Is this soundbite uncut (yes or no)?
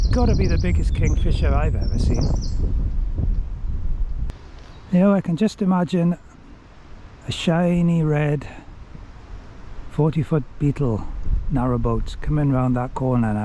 no